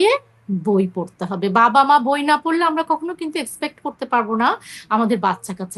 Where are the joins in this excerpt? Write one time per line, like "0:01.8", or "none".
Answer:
none